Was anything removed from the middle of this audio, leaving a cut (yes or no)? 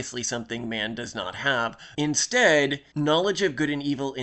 yes